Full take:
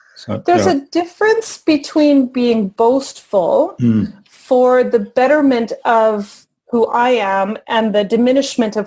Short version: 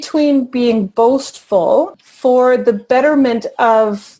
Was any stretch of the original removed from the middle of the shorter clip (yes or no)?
yes